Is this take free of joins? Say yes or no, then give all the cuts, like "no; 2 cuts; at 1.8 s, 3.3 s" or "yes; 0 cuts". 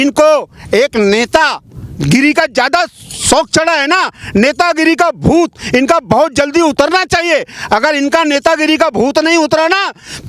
yes; 0 cuts